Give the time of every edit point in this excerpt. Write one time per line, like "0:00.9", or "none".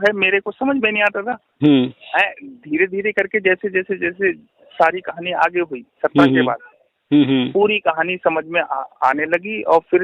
none